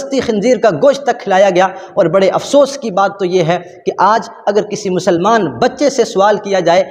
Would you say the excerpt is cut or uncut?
cut